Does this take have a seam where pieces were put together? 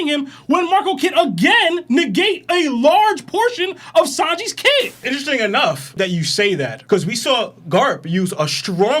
yes; 1 cut; at 5.0 s

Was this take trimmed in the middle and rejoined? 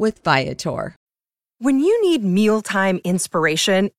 yes; 1 cut; at 1.0 s

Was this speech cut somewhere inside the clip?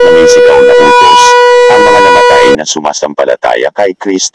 yes; 1 cut; at 2.5 s

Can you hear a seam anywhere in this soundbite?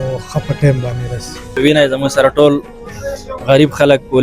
yes; 1 cut; at 1.5 s

